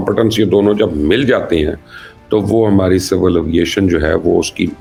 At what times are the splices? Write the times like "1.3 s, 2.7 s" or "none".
none

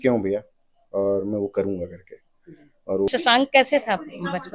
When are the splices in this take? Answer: 3.1 s

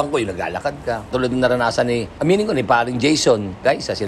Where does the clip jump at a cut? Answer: 1.1 s

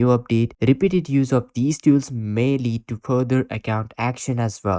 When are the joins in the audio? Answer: none

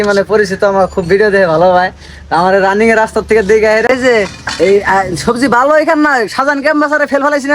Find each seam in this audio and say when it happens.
3.8 s

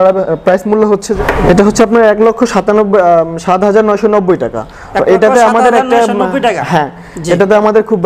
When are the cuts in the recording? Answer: 1.2 s

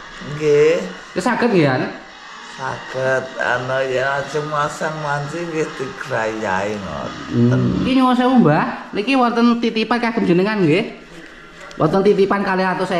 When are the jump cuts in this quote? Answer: 7.9 s

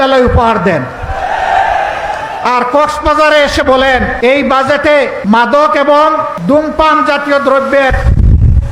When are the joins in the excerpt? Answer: 4.1 s, 5.2 s, 6.3 s

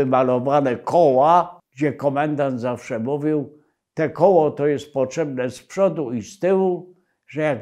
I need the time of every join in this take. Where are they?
1.6 s

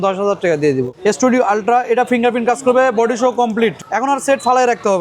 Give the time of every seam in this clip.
0.9 s, 3.8 s

